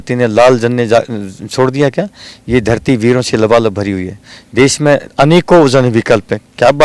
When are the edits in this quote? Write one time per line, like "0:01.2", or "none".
none